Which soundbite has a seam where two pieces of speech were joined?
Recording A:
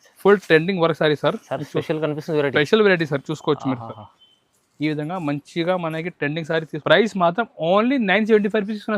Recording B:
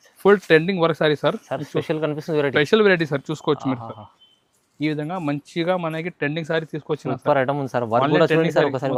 A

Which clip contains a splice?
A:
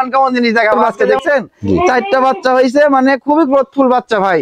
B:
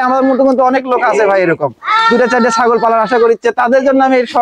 A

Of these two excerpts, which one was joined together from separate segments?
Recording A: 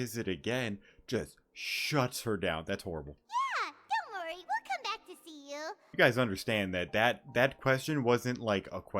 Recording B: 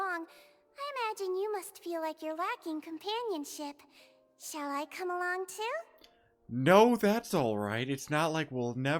A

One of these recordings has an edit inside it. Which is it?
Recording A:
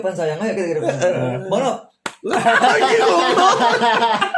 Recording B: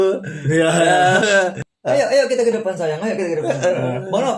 B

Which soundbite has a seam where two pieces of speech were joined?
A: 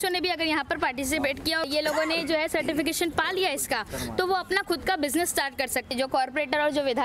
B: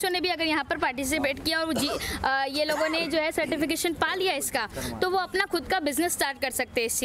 A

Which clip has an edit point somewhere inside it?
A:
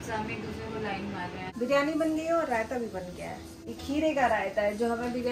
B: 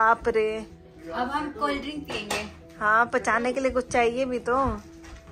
A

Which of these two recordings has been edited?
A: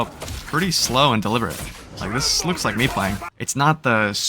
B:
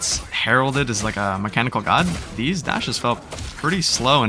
A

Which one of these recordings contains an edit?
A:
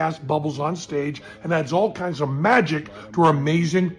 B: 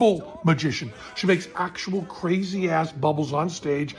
B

